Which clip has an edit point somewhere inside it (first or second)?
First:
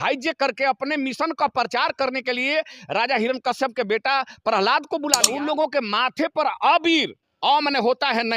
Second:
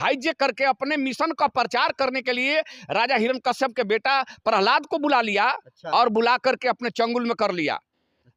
first